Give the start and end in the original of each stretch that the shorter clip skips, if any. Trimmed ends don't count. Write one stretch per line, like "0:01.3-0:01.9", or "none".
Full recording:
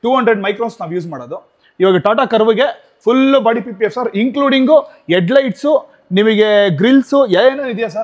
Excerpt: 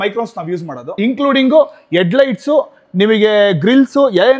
0:01.4-0:04.1